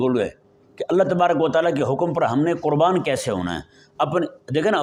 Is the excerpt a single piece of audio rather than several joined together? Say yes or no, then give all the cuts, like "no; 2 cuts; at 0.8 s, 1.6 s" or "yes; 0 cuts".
yes; 0 cuts